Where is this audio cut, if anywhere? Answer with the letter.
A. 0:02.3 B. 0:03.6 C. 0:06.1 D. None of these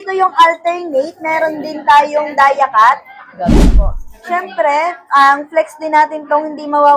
B